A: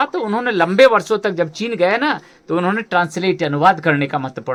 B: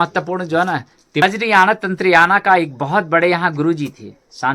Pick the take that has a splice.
B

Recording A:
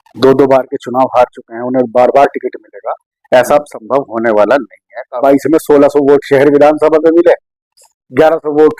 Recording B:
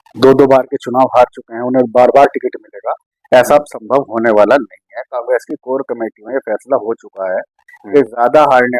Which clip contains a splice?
A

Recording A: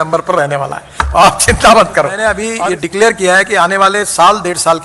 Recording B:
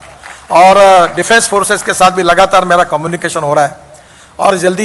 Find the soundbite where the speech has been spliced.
A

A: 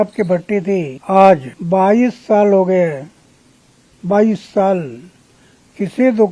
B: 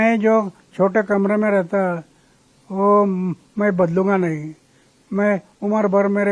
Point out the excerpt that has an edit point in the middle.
A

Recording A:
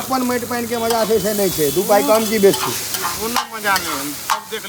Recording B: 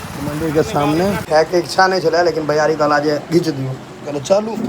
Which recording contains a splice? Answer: B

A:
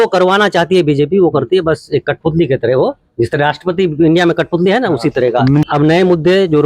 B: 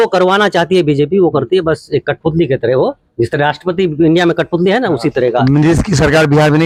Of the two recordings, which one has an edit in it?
A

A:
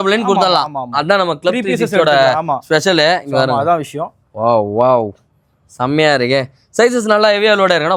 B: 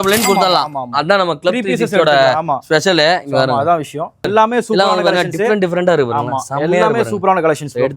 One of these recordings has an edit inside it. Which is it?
B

